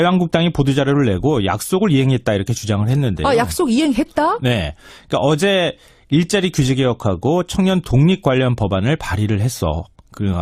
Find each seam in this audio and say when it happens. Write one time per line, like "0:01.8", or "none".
none

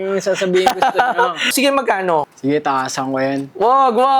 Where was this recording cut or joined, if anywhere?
0:01.5

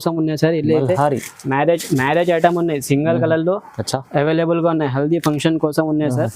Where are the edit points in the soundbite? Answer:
none

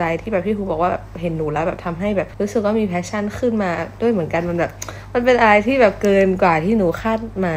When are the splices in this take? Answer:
none

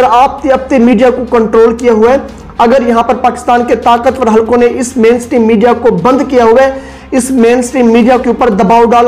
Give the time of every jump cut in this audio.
none

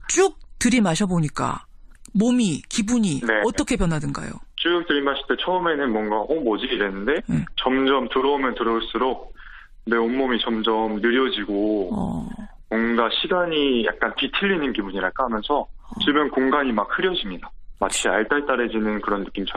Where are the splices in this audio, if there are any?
0:08.1

